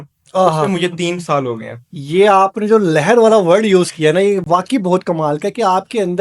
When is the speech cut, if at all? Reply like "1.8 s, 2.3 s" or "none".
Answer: none